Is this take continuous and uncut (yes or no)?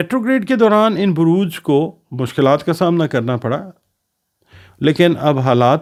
yes